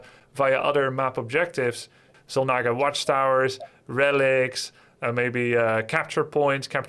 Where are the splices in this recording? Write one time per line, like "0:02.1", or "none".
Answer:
0:02.1